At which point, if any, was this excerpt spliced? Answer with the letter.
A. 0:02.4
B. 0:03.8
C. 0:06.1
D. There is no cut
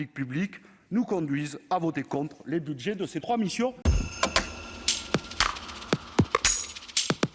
B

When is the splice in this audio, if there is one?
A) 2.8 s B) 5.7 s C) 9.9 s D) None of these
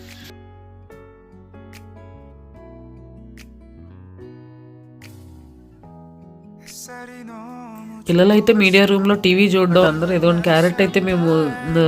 C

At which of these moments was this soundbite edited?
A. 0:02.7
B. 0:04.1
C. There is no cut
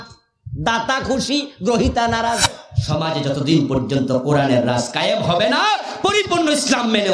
A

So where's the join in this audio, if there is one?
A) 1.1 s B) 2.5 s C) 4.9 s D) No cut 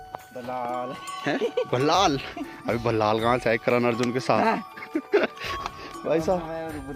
D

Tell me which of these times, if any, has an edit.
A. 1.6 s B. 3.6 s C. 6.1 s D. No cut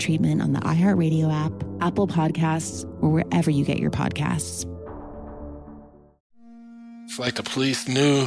C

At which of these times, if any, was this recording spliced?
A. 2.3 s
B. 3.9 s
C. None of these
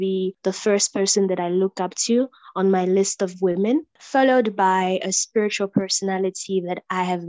C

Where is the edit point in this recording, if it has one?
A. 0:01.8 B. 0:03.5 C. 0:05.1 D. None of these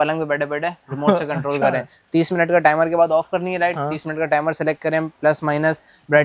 D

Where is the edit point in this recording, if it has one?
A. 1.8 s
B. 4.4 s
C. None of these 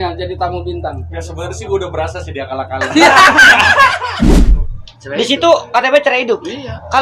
B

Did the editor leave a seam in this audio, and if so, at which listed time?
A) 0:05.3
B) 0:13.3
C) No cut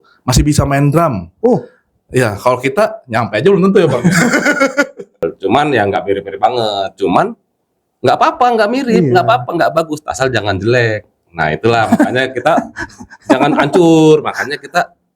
A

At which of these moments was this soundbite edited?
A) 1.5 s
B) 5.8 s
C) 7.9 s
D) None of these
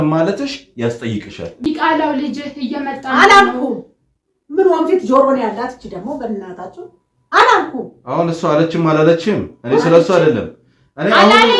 A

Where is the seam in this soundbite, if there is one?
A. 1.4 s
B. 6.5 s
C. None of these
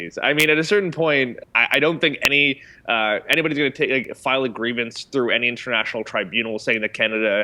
A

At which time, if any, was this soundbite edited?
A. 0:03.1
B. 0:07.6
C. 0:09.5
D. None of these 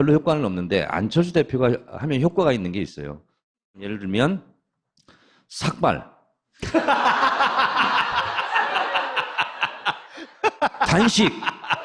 C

